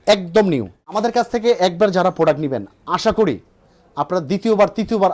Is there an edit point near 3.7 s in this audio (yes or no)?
no